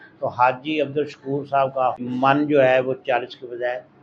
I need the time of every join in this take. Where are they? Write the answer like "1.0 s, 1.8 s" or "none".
2.0 s